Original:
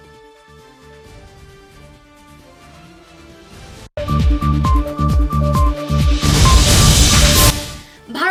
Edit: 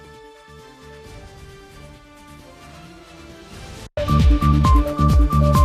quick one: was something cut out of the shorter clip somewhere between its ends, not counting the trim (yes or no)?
no